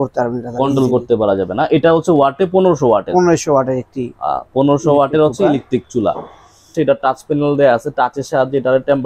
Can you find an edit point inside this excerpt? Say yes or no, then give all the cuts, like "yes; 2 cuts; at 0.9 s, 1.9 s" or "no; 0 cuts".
yes; 1 cut; at 6.7 s